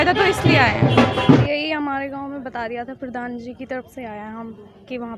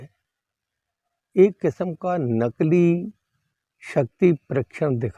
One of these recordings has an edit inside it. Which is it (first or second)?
first